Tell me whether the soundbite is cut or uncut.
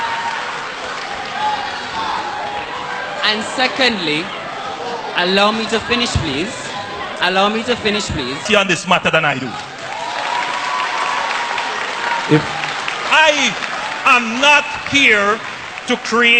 cut